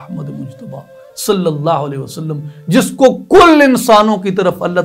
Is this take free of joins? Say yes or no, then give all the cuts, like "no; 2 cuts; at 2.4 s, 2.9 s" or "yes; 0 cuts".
yes; 0 cuts